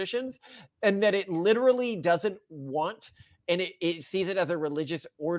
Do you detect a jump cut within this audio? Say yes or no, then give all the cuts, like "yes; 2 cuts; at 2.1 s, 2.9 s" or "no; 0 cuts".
no; 0 cuts